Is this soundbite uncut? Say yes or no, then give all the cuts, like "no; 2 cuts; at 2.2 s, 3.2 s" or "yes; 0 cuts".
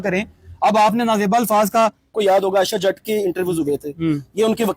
no; 1 cut; at 2.2 s